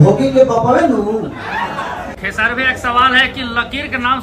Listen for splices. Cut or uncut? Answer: cut